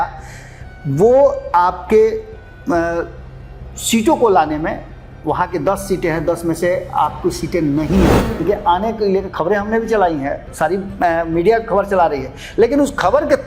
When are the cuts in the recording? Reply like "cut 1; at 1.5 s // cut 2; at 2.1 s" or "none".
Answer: cut 1; at 8.4 s